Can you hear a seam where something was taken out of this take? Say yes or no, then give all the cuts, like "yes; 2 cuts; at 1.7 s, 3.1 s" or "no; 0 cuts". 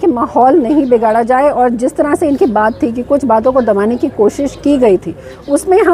no; 0 cuts